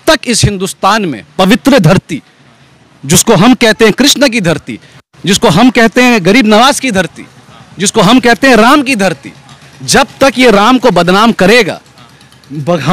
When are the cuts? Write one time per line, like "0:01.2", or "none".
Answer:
none